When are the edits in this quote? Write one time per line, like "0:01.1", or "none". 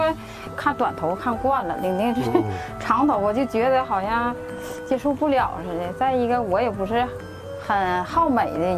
none